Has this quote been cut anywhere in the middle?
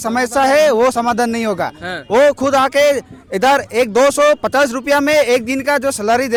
no; 0 cuts

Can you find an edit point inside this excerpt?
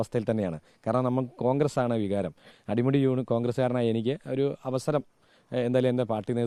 no; 0 cuts

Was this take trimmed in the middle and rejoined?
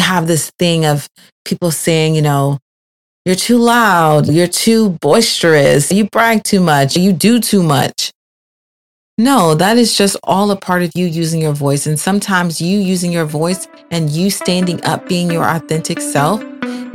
yes; 3 cuts; at 4.3 s, 5.9 s, 7.0 s

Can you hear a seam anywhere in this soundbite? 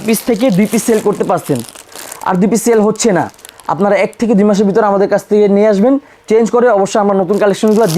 no; 0 cuts

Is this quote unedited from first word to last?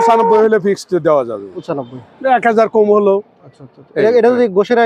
yes; 0 cuts

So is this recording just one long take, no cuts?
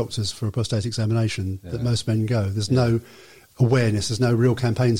yes; 0 cuts

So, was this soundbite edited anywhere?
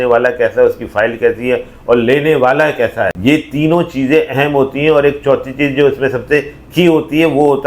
yes; 1 cut; at 3.1 s

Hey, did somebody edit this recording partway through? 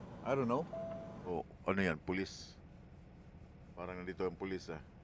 yes; 1 cut; at 1.2 s

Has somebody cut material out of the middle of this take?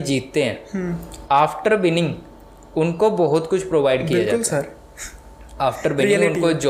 no; 0 cuts

